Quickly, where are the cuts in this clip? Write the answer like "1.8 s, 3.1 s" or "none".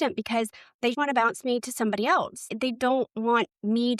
0.9 s, 2.5 s